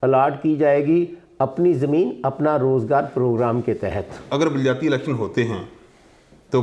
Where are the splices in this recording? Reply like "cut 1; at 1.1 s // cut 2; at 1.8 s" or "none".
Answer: cut 1; at 4.2 s